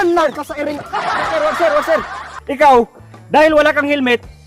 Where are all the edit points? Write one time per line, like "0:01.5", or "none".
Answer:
0:01.2

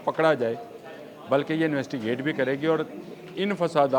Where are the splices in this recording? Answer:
none

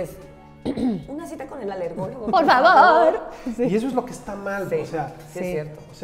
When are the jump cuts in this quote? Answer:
none

